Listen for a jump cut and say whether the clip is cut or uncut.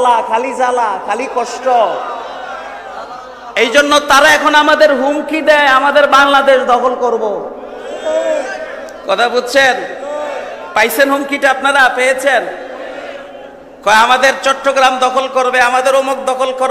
uncut